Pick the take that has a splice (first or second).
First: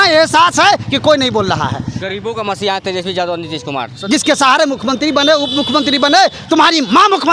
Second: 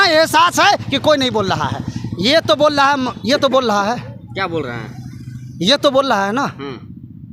first